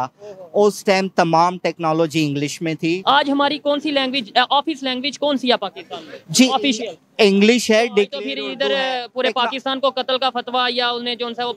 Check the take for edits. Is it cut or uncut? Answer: cut